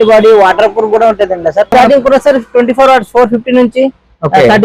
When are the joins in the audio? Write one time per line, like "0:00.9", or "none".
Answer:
0:01.7